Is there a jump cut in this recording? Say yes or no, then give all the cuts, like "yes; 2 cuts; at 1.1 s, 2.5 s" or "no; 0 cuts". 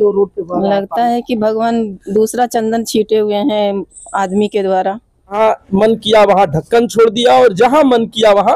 yes; 1 cut; at 5.4 s